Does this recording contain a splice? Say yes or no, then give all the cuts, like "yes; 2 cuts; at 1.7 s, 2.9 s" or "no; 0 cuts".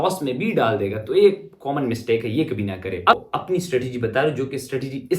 yes; 1 cut; at 3.1 s